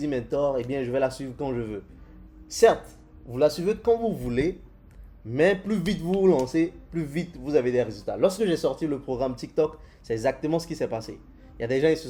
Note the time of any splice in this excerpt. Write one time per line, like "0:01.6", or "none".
none